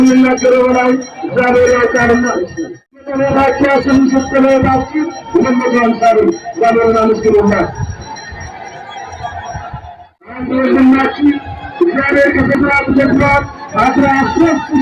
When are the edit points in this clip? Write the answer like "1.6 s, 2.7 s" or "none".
3.2 s

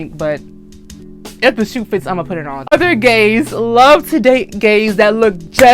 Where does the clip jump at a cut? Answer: 2.7 s

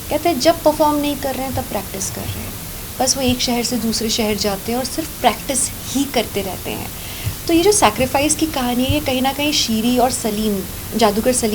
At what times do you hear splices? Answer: none

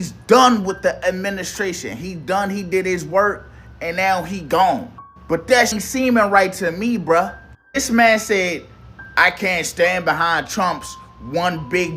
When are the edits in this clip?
5.7 s

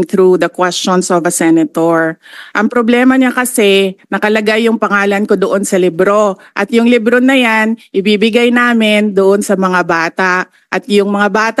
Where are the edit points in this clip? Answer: none

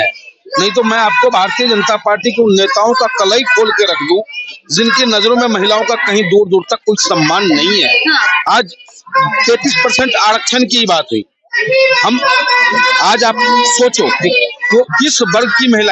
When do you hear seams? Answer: none

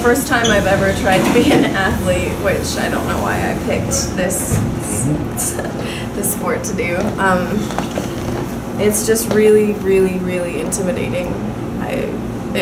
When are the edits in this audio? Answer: none

